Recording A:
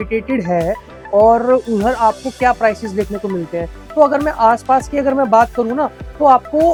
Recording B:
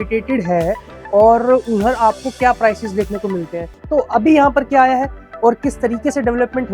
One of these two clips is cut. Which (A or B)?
B